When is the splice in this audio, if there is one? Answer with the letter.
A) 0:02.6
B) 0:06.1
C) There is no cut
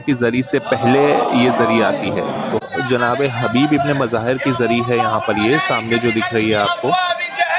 A